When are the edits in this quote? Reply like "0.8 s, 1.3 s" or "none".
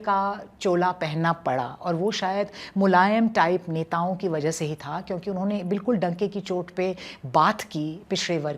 none

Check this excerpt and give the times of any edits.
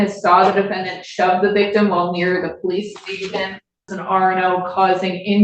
3.9 s

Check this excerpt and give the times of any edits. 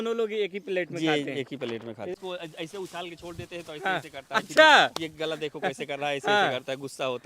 2.2 s

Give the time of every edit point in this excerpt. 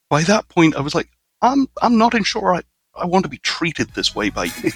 none

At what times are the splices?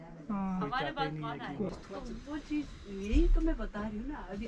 1.7 s

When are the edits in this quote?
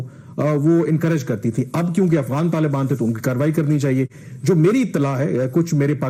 none

